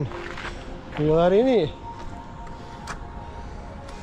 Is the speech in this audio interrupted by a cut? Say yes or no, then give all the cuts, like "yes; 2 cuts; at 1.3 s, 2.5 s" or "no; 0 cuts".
no; 0 cuts